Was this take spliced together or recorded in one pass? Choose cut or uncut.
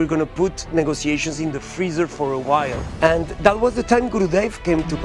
cut